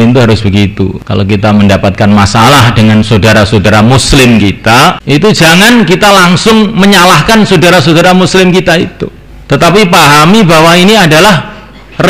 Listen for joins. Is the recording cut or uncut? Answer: cut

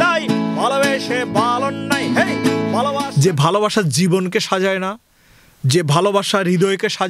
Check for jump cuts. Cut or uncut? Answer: cut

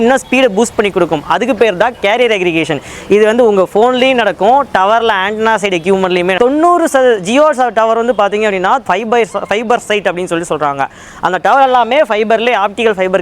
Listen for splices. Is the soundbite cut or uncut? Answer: cut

